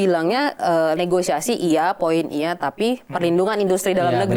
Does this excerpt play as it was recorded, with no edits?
yes; 0 cuts

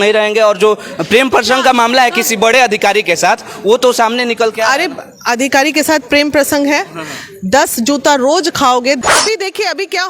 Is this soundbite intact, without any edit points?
no; 1 cut; at 9.0 s

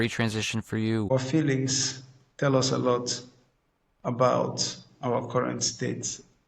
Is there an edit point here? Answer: yes; 1 cut; at 1.1 s

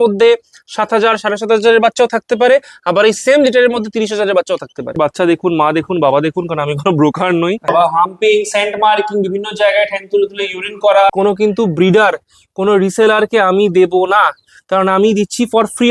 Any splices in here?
yes; 3 cuts; at 4.9 s, 7.7 s, 11.1 s

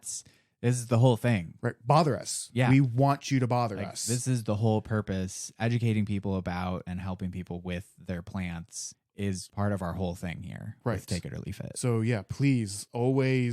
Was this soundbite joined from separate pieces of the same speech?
no; 0 cuts

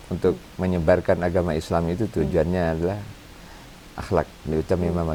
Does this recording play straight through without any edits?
yes; 0 cuts

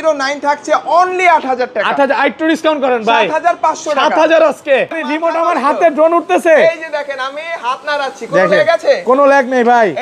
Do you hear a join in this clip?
yes; 1 cut; at 5.0 s

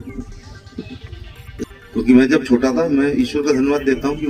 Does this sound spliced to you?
yes; 1 cut; at 1.6 s

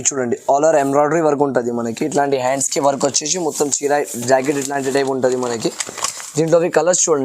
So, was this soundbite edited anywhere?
no; 0 cuts

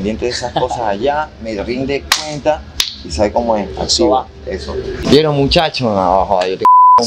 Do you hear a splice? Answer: yes; 1 cut; at 6.0 s

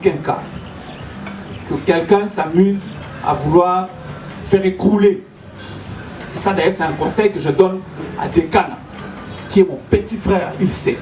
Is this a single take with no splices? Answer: yes; 0 cuts

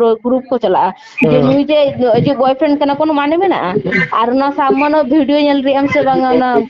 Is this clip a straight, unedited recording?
no; 1 cut; at 1.0 s

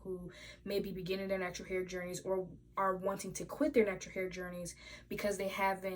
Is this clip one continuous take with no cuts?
yes; 0 cuts

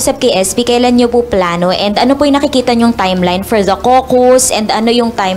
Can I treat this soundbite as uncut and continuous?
yes; 0 cuts

